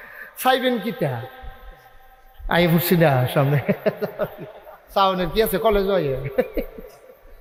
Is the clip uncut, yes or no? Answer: yes